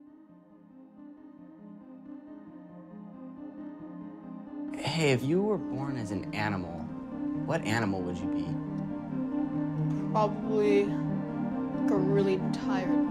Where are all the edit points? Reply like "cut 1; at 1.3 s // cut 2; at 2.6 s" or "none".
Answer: cut 1; at 12.1 s